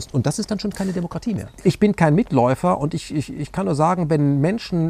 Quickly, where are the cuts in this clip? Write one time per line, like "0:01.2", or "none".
0:01.4